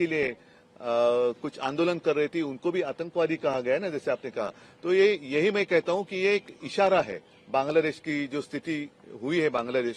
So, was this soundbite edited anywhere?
no; 0 cuts

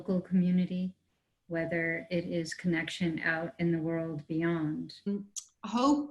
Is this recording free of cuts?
no; 1 cut; at 5.1 s

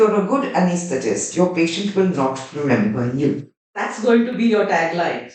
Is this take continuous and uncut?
yes; 0 cuts

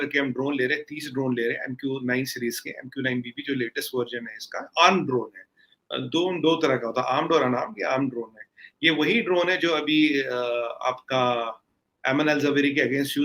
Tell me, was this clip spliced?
no; 0 cuts

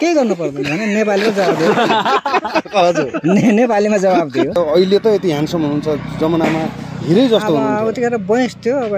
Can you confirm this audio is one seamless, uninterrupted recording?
no; 1 cut; at 4.6 s

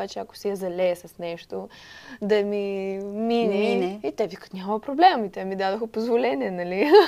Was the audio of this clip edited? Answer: no; 0 cuts

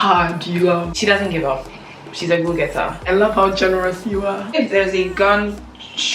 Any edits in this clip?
yes; 3 cuts; at 0.9 s, 3.0 s, 4.5 s

